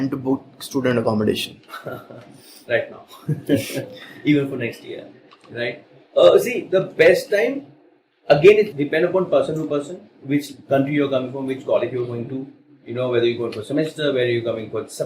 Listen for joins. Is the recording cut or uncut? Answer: uncut